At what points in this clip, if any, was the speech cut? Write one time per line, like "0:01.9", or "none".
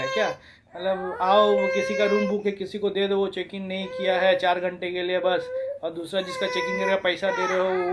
none

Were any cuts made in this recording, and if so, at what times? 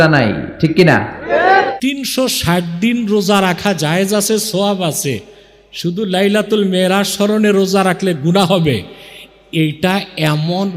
0:01.7

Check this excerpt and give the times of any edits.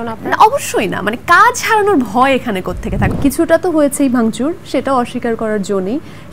0:03.1

